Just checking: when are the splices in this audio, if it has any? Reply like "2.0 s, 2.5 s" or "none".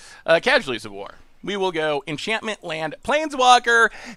none

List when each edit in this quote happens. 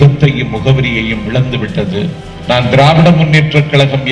2.3 s

